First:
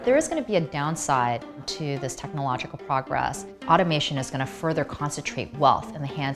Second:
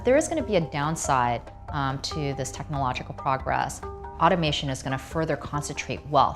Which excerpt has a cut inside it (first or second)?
first